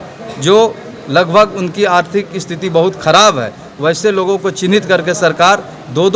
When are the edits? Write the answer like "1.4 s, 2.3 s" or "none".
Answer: none